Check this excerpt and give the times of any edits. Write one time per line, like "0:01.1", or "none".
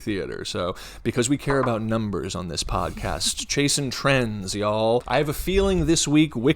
0:05.1